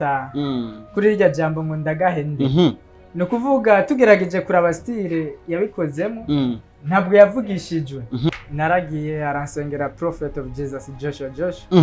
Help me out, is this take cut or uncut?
cut